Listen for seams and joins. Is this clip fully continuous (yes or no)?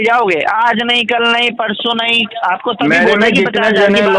no